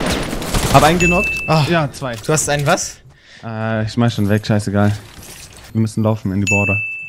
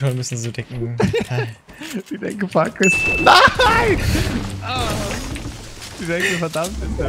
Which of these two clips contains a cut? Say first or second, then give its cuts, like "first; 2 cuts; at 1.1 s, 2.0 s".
first; 1 cut; at 5.7 s